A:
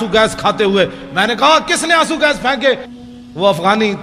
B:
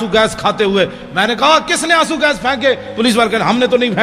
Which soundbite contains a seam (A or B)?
A